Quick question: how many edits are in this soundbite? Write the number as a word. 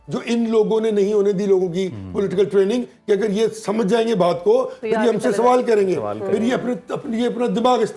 zero